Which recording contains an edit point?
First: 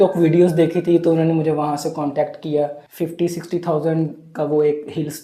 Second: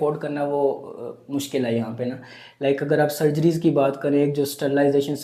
first; 1 cut; at 2.8 s

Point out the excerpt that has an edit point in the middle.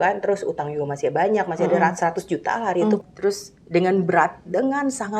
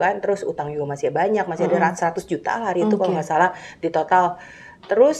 first; 1 cut; at 3.0 s

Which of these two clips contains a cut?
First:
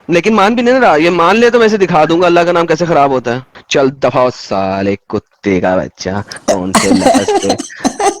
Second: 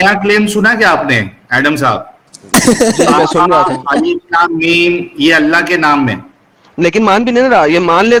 first; 1 cut; at 3.5 s

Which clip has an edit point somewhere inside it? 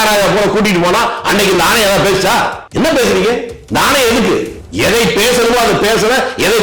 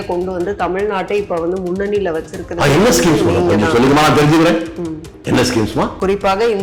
first; 3 cuts; at 2.6 s, 3.5 s, 4.6 s

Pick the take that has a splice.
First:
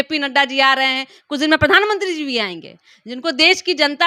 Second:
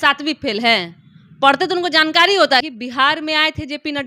second; 1 cut; at 2.6 s

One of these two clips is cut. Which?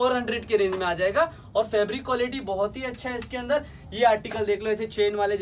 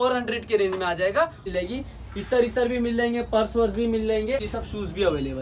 second; 2 cuts; at 1.5 s, 4.4 s

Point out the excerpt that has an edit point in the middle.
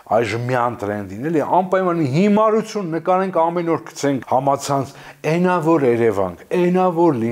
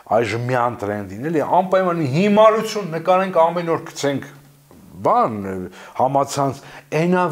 first; 1 cut; at 4.2 s

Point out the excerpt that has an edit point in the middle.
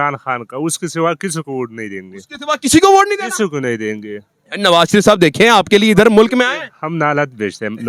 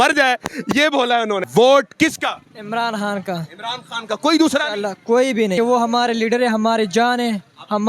second; 2 cuts; at 1.5 s, 5.5 s

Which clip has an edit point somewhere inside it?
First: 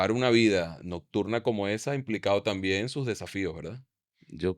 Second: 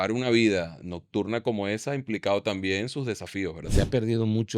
second; 1 cut; at 3.6 s

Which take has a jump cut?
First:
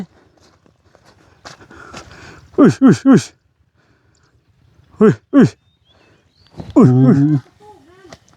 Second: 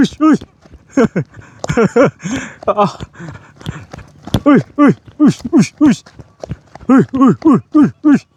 first; 1 cut; at 7.0 s

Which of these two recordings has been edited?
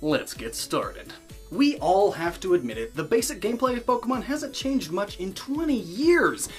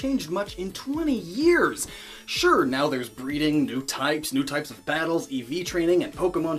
second; 1 cut; at 4.5 s

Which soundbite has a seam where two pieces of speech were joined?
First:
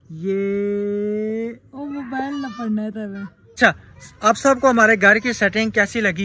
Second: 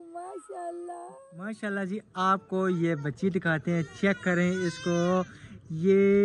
first; 1 cut; at 3.6 s

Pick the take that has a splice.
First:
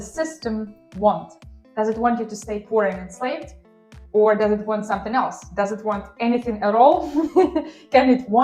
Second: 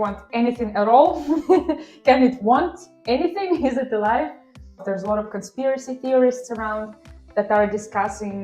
second; 1 cut; at 4.8 s

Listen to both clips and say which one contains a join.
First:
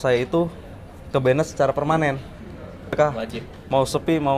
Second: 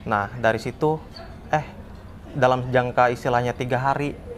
first; 1 cut; at 3.0 s

